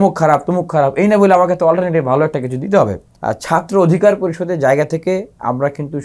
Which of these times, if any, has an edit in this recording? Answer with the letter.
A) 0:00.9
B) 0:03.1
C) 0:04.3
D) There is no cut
B